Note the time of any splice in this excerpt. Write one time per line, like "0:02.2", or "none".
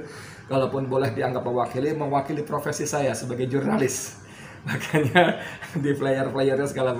none